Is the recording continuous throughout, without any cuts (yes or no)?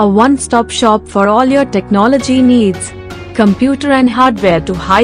yes